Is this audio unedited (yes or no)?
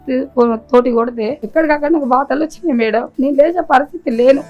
no